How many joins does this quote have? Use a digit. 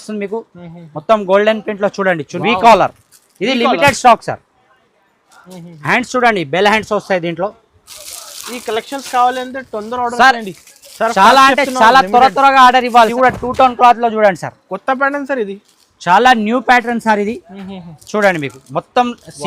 2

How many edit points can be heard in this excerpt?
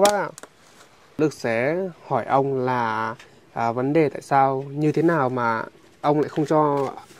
1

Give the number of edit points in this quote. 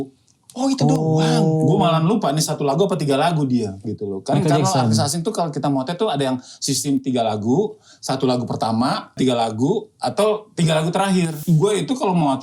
2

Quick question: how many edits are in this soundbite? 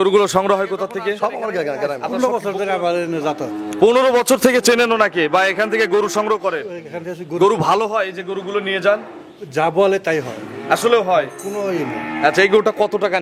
1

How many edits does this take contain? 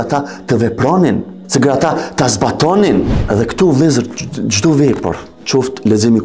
1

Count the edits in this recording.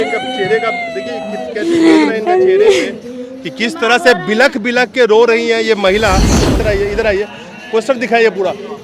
1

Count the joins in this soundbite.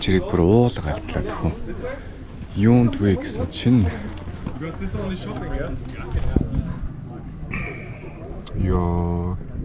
0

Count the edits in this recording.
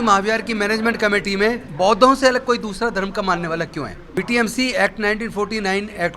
2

